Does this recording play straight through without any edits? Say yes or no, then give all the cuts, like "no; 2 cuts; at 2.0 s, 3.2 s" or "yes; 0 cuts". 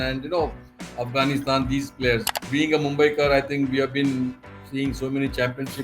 no; 1 cut; at 2.4 s